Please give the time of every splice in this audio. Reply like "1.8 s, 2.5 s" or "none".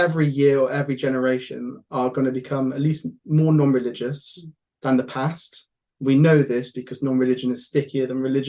none